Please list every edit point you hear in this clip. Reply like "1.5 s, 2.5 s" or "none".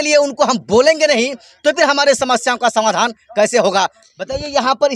4.0 s